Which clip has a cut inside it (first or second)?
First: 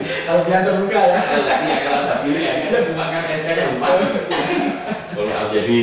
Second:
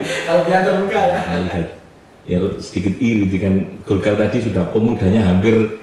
second